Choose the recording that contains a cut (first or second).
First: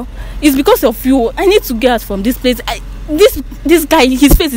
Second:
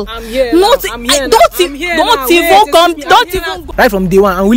second